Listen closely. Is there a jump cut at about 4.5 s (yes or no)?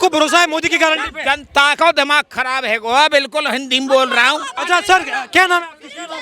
yes